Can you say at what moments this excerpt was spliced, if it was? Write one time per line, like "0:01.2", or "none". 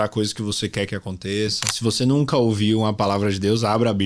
0:01.7